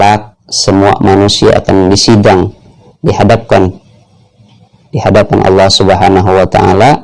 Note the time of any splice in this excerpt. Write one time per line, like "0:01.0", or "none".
none